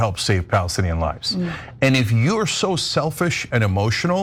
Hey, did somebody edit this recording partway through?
no; 0 cuts

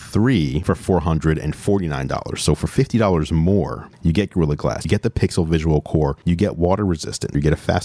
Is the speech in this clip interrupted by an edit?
yes; 1 cut; at 6.2 s

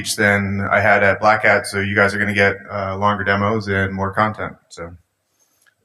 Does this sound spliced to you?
yes; 1 cut; at 3.1 s

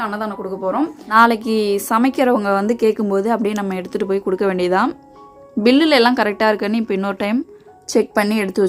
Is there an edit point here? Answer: yes; 1 cut; at 1.0 s

